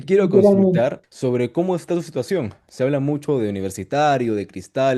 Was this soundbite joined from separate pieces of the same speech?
yes; 1 cut; at 1.1 s

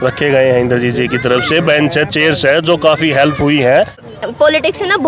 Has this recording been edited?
yes; 1 cut; at 4.0 s

